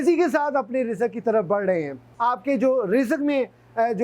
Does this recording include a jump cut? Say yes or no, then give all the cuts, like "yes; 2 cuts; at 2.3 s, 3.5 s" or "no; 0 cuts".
yes; 1 cut; at 2.0 s